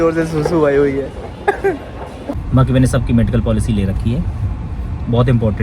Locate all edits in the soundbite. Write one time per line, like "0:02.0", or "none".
0:02.4

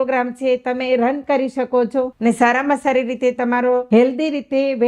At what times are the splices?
0:02.1
0:03.8

